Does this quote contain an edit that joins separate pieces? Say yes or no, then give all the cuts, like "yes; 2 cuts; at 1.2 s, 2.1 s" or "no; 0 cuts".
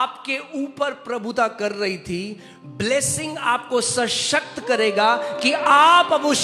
no; 0 cuts